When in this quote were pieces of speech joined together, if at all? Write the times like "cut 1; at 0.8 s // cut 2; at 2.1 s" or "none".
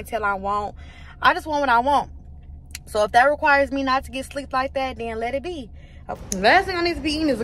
cut 1; at 6.2 s